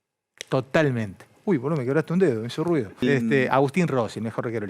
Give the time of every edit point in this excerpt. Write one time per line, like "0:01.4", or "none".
0:03.0